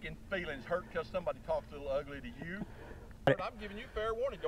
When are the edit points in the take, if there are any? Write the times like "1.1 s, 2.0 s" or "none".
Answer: 3.3 s